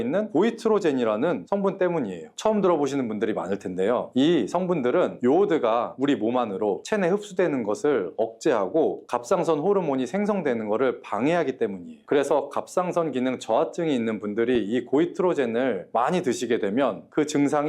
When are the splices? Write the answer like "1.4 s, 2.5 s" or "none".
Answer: none